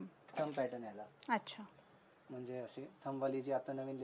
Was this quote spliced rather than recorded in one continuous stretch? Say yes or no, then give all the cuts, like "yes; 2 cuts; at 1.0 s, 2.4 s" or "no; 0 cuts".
no; 0 cuts